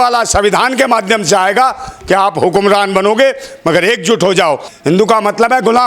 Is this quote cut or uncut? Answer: cut